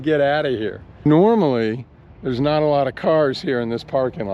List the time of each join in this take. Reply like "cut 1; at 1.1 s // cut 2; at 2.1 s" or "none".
cut 1; at 1.0 s